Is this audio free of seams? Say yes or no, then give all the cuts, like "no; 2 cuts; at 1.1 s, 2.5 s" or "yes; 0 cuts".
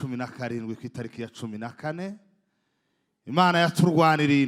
yes; 0 cuts